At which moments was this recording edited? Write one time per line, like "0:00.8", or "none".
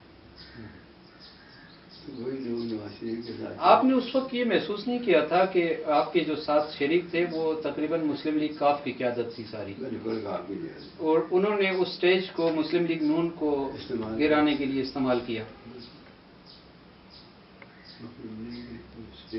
none